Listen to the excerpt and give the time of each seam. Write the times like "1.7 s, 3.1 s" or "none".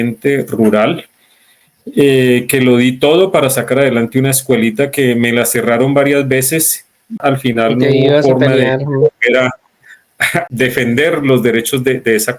7.2 s, 10.5 s